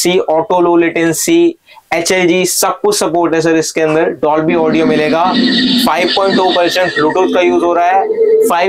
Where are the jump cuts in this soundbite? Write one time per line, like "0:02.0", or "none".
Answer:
none